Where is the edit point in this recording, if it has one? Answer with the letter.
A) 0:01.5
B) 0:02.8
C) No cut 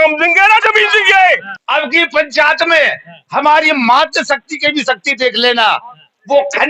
A